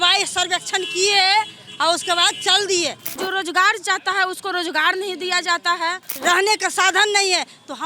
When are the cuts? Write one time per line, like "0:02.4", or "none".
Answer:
0:03.2
0:06.1

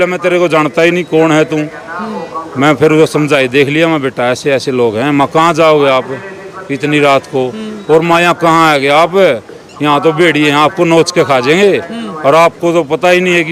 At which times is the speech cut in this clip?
none

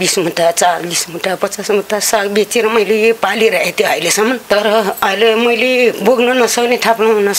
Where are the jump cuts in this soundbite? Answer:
none

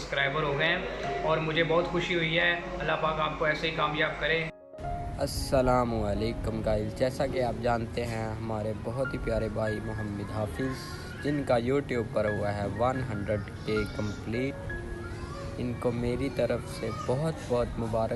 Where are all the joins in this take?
none

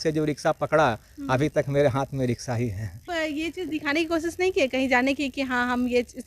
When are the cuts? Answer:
0:03.0

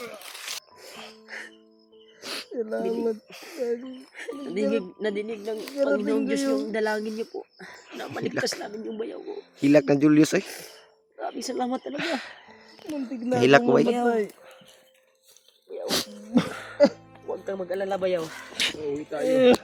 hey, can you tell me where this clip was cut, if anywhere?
none

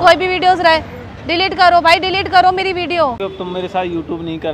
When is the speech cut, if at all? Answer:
0:03.2

